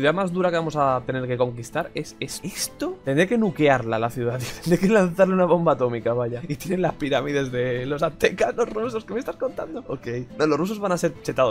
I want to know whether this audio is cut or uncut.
cut